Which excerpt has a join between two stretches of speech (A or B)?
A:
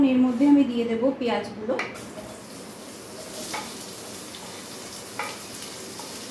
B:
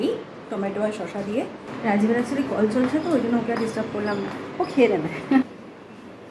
B